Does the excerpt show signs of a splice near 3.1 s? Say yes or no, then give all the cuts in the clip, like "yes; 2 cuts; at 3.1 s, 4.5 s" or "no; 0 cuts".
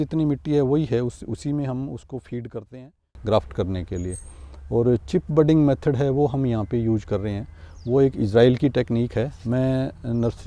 yes; 1 cut; at 3.1 s